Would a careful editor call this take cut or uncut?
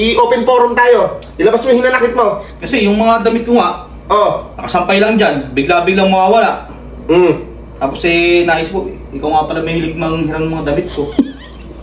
uncut